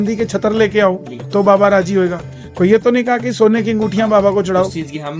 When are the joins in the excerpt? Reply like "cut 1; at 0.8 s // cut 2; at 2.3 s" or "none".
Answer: none